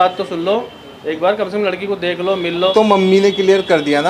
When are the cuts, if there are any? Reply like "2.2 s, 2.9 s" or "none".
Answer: 2.7 s

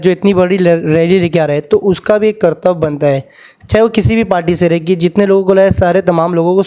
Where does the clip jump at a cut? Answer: none

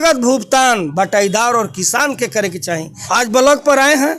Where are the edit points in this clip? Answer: 2.9 s

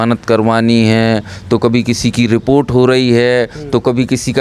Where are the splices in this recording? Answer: none

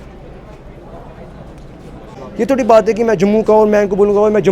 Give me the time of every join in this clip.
2.2 s

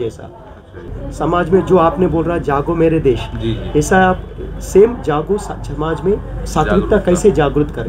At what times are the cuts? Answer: 0.9 s

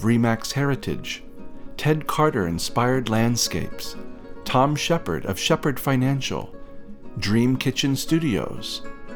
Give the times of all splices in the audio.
none

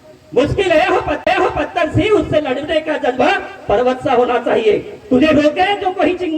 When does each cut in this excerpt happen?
1.2 s

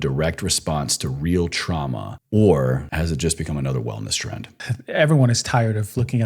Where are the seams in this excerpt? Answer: 2.1 s, 2.9 s, 4.6 s

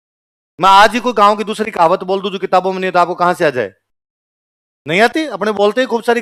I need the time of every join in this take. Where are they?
none

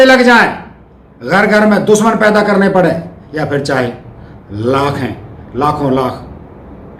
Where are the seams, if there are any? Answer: none

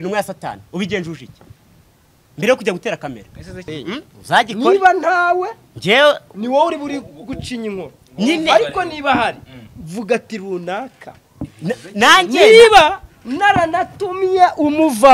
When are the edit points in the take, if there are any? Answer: 3.5 s

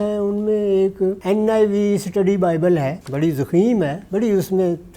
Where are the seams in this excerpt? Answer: 1.2 s, 3.0 s, 4.0 s

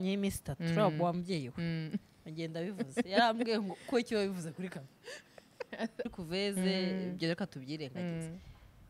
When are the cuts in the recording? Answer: 6.1 s

